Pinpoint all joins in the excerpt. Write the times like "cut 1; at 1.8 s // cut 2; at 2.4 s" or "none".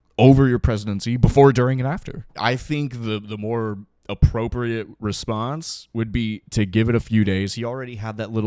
cut 1; at 2.3 s